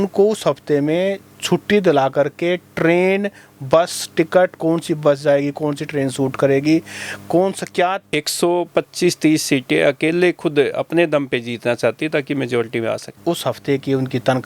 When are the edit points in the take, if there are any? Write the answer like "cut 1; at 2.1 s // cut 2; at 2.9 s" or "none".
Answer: cut 1; at 8.0 s // cut 2; at 13.1 s